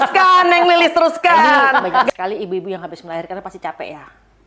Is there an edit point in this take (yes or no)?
yes